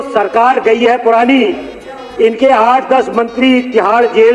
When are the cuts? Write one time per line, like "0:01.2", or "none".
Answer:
none